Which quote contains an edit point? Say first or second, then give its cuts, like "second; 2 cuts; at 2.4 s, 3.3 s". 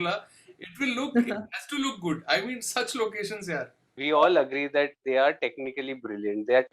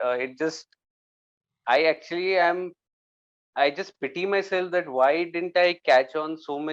first; 1 cut; at 4.0 s